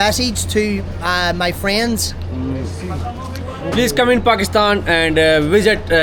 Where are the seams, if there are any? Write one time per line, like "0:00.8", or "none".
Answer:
none

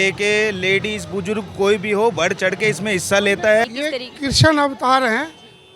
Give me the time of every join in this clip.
0:03.7

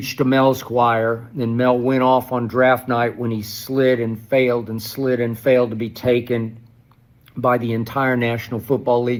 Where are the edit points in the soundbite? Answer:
none

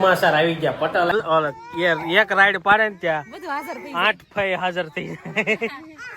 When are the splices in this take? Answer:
0:01.1

